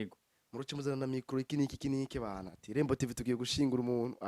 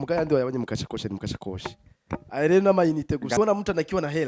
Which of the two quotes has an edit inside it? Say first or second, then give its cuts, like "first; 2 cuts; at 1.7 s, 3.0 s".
second; 1 cut; at 3.4 s